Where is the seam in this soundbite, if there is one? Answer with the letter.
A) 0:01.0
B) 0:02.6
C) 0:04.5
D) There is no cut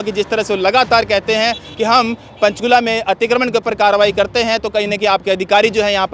D